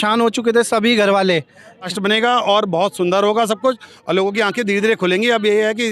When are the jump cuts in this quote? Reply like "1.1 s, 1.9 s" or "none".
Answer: 1.9 s